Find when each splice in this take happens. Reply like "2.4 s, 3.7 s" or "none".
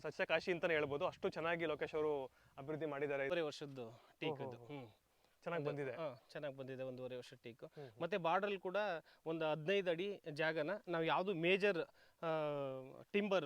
3.3 s